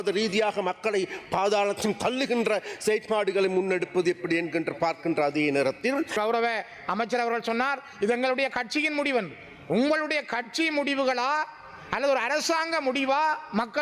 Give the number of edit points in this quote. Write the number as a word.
one